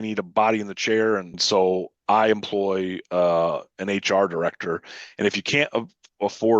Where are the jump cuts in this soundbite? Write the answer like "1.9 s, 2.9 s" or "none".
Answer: 1.4 s